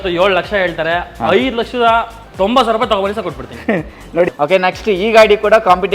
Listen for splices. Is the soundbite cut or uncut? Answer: cut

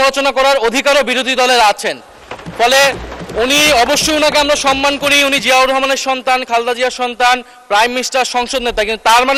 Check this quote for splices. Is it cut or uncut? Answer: uncut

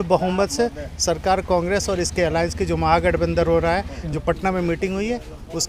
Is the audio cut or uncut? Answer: uncut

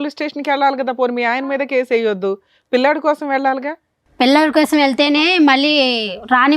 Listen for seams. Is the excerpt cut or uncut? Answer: uncut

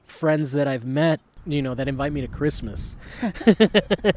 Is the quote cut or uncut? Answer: cut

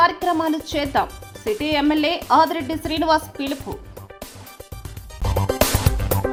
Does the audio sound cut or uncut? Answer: uncut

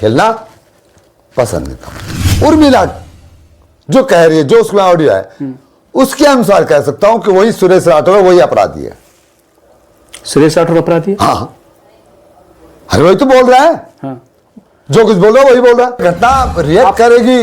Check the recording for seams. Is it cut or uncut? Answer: cut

